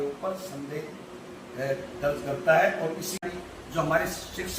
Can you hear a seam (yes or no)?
yes